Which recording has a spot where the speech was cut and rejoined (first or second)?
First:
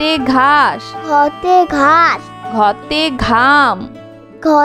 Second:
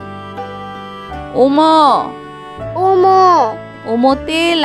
second